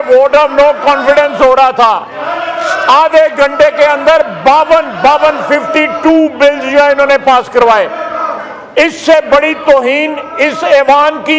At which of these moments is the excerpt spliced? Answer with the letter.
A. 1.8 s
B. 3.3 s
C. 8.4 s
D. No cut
D